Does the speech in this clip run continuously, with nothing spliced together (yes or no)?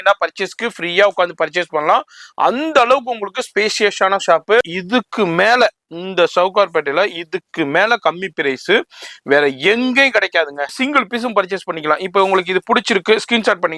no